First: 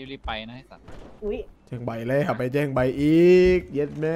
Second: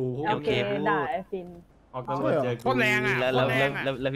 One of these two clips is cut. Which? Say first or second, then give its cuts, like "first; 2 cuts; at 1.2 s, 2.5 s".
first; 1 cut; at 1.6 s